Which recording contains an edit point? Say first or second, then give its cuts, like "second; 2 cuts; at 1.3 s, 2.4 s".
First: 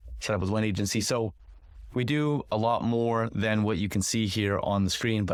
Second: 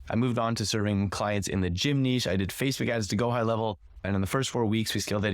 second; 1 cut; at 4.0 s